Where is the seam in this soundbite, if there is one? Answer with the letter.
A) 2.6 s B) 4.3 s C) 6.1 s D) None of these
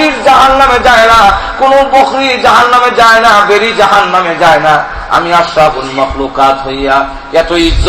C